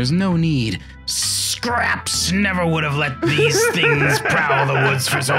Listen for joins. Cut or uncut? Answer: uncut